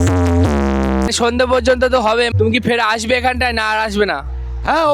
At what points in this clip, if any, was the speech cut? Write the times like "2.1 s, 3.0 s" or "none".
1.1 s, 2.3 s